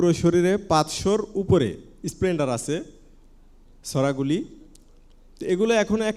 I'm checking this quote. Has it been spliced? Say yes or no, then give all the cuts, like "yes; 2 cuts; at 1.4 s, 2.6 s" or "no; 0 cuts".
no; 0 cuts